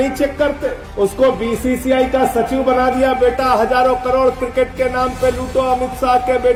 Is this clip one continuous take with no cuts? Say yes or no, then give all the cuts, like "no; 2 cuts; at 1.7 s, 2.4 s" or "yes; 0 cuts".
yes; 0 cuts